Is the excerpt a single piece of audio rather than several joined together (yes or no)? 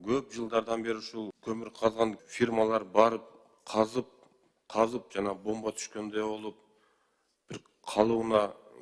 no